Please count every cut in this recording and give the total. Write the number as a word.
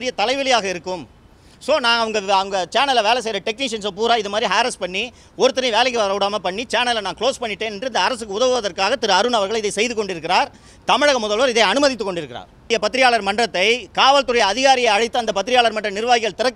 one